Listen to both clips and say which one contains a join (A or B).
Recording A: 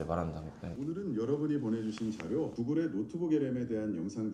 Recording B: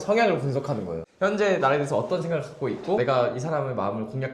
B